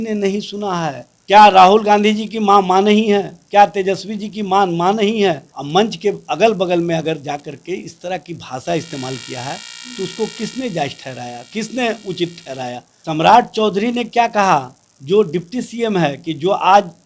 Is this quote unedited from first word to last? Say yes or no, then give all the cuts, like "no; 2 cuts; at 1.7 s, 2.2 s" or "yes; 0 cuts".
no; 3 cuts; at 1.1 s, 5.5 s, 12.9 s